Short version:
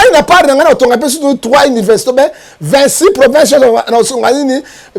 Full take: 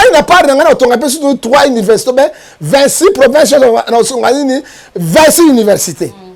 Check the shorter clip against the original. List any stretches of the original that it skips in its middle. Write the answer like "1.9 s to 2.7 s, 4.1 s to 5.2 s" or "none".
none

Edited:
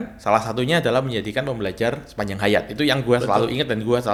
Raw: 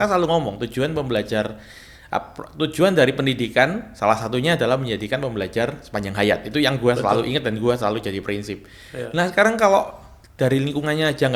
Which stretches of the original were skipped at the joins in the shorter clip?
none

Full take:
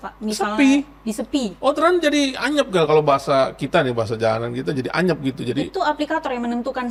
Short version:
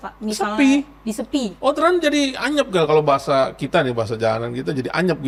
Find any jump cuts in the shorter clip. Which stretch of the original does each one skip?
none

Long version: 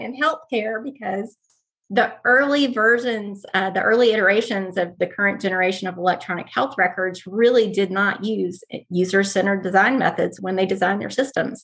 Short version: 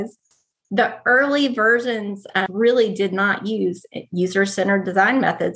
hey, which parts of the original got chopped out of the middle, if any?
3.7 s to 7.3 s

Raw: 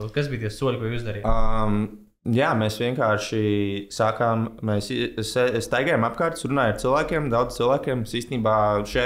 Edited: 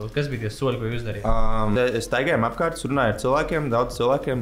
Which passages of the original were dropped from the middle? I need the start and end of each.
1.7 s to 5.3 s

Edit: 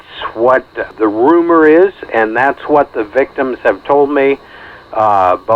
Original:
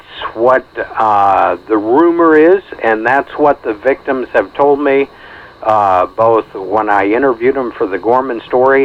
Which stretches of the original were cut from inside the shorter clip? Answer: 0.9 s to 1.6 s

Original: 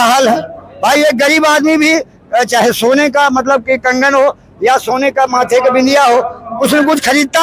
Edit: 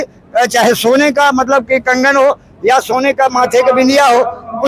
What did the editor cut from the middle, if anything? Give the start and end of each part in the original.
none

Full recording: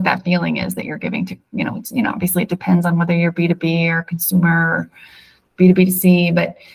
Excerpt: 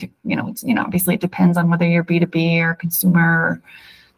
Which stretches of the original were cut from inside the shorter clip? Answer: none

